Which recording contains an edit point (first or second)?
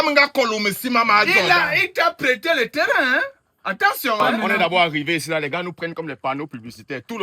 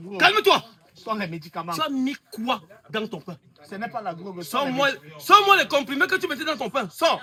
first